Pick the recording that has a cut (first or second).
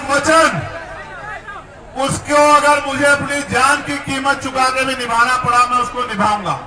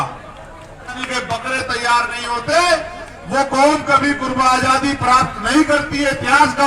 second